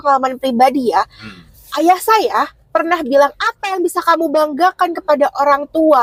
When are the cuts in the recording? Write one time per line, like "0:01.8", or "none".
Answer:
none